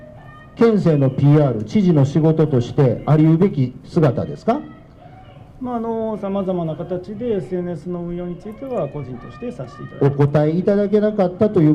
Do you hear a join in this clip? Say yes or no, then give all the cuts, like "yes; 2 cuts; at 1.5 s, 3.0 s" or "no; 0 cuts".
no; 0 cuts